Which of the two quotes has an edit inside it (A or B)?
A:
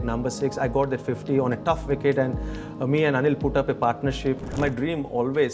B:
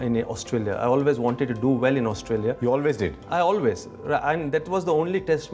A